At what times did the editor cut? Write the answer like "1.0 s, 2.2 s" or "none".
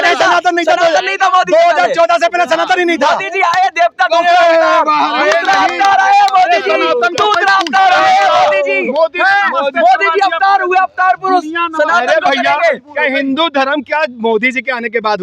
none